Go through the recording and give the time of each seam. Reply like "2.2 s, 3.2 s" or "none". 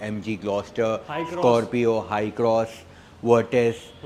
none

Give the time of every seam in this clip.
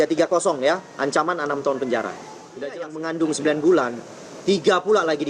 2.8 s

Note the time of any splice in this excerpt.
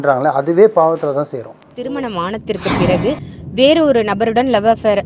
1.7 s

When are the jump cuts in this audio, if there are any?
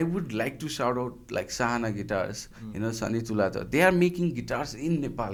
none

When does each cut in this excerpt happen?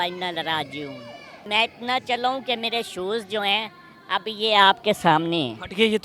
1.5 s

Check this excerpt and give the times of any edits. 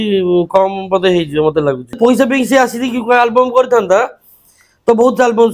2.0 s

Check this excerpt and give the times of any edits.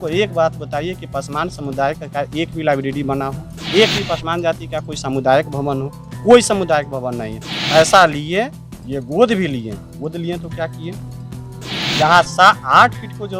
3.5 s

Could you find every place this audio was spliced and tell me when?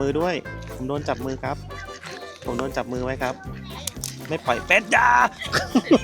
3.5 s

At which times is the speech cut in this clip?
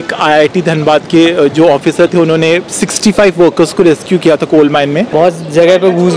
5.1 s

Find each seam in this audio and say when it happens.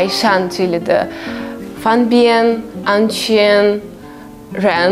none

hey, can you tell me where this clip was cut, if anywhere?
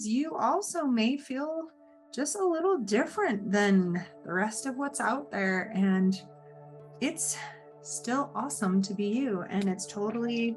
none

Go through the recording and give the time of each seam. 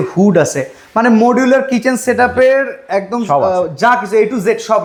none

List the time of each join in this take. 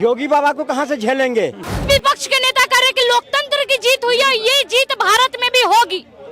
1.9 s

